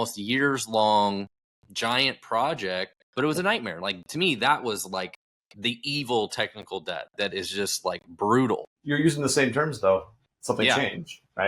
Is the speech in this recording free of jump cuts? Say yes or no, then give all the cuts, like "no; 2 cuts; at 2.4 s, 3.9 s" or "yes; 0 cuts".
no; 2 cuts; at 3.0 s, 8.7 s